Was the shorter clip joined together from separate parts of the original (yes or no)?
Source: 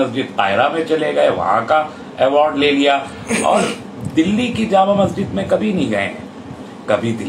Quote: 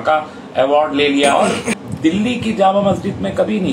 yes